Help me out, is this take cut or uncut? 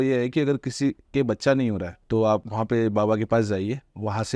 cut